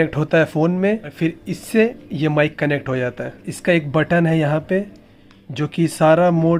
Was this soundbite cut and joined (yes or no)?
no